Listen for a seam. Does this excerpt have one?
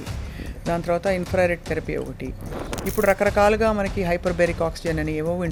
no; 0 cuts

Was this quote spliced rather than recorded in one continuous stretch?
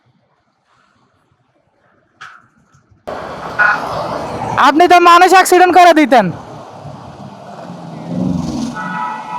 yes; 1 cut; at 3.1 s

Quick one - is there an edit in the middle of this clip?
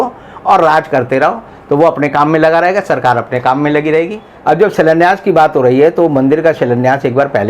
yes; 1 cut; at 4.2 s

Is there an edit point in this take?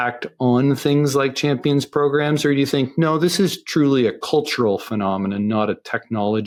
no; 0 cuts

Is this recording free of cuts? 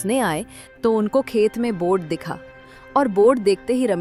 yes; 0 cuts

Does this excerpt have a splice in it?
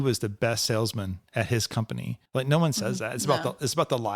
yes; 1 cut; at 2.2 s

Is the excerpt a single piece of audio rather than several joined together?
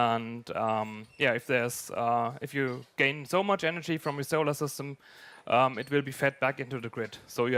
yes; 0 cuts

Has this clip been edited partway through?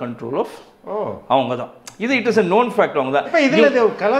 no; 0 cuts

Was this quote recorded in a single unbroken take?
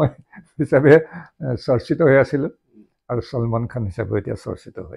yes; 0 cuts

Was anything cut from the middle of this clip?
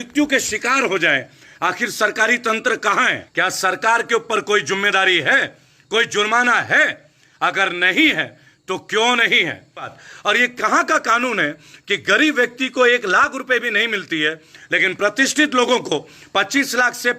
yes; 2 cuts; at 3.2 s, 10.0 s

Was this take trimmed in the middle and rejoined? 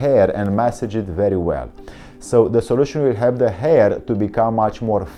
no; 0 cuts

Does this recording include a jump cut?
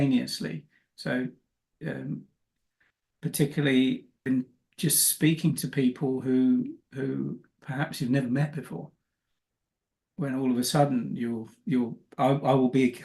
yes; 1 cut; at 4.3 s

